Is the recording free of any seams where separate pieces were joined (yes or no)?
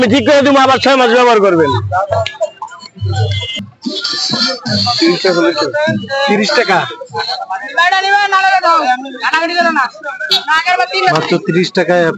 no